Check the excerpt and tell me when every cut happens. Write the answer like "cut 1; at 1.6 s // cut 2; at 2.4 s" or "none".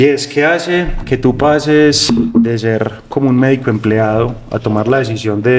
none